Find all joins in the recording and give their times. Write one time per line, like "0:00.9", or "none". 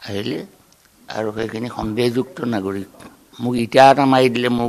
0:03.3